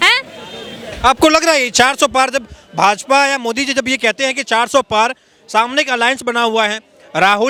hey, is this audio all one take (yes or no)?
yes